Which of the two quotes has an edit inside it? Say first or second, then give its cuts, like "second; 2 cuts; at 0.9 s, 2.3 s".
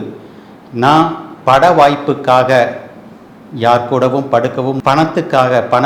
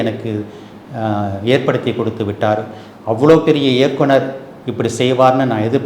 first; 1 cut; at 4.8 s